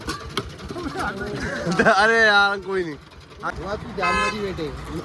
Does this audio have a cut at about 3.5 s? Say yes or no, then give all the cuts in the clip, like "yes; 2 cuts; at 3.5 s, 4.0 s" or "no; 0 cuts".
yes; 1 cut; at 3.5 s